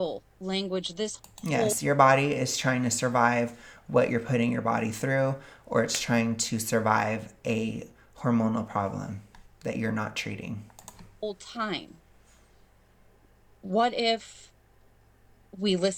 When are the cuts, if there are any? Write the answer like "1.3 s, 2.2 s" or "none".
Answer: none

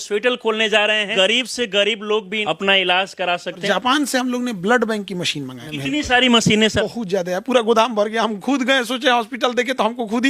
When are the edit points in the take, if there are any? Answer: 1.1 s, 2.4 s, 3.6 s, 5.6 s, 6.8 s

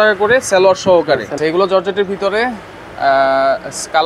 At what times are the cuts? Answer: 1.4 s

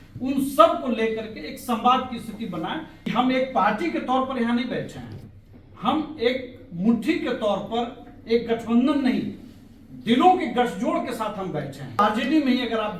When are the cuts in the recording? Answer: 3.1 s, 12.0 s

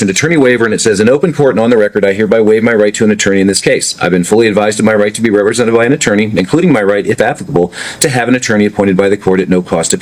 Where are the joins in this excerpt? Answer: none

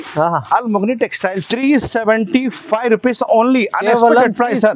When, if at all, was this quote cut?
1.4 s

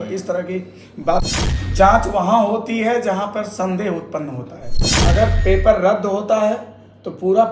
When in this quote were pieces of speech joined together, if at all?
1.2 s, 4.9 s

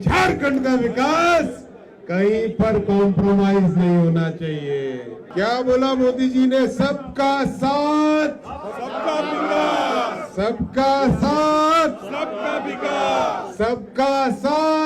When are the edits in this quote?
5.2 s

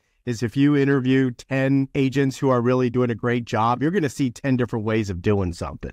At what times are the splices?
1.9 s

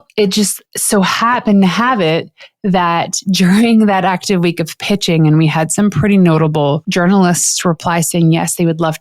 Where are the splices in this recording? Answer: 6.8 s

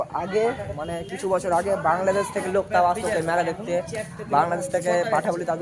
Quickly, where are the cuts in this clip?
none

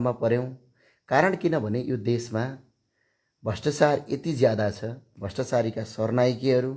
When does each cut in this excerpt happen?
none

